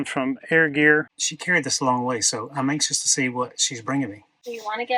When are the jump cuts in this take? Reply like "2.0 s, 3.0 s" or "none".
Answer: 1.2 s